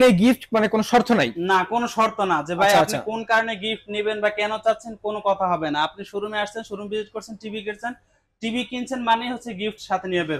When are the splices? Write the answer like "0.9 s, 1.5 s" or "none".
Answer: none